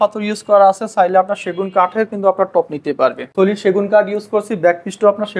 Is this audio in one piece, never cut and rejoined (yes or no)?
no